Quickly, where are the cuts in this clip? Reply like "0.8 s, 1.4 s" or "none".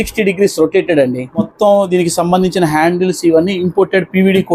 none

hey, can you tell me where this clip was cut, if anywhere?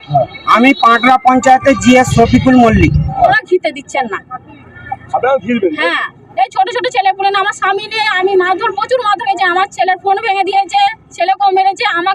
3.4 s

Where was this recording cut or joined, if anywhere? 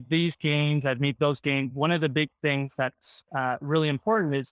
none

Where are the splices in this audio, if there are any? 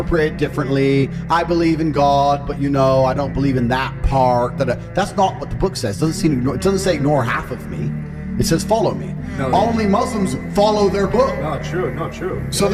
none

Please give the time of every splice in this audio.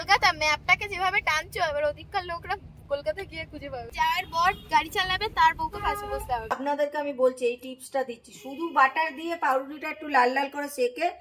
3.9 s, 6.6 s

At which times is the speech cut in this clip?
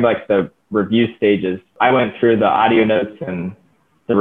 1.7 s

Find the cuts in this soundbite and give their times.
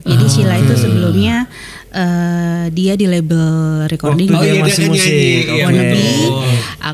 none

